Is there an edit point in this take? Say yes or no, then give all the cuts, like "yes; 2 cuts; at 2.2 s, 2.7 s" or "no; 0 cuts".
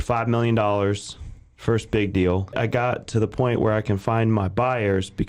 yes; 1 cut; at 2.5 s